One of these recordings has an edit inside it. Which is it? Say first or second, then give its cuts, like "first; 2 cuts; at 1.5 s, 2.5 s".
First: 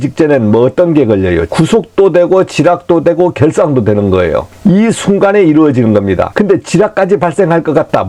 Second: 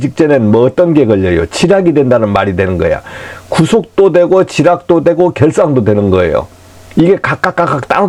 first; 3 cuts; at 1.5 s, 4.5 s, 6.3 s